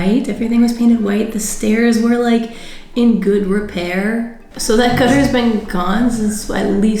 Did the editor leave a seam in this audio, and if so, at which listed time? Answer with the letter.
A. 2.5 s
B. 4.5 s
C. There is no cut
B